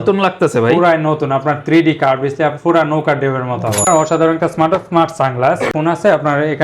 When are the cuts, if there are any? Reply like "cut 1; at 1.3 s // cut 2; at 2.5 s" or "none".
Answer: cut 1; at 3.9 s // cut 2; at 5.8 s